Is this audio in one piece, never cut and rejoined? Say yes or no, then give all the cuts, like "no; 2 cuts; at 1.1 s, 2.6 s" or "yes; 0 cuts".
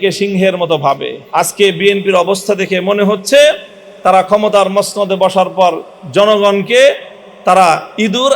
no; 1 cut; at 1.2 s